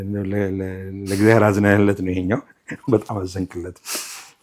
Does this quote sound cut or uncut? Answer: uncut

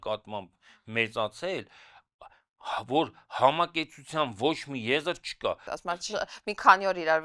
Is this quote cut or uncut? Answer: cut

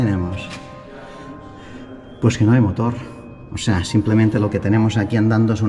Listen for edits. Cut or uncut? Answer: uncut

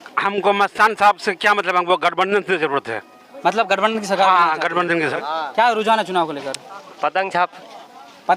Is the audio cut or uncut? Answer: cut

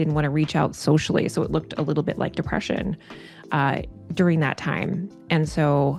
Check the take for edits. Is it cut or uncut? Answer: uncut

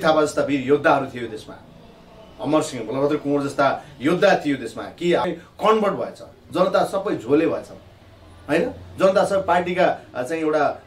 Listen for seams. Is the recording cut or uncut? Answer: cut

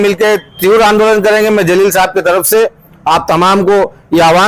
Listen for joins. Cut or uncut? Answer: uncut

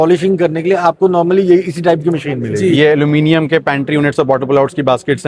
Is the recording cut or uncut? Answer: cut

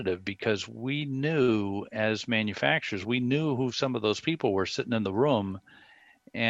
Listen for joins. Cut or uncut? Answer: uncut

